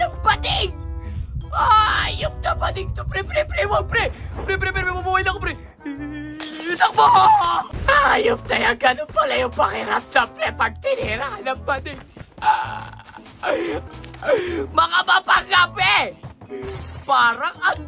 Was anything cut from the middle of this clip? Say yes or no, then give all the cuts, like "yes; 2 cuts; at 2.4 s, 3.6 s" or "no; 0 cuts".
yes; 2 cuts; at 7.7 s, 13.8 s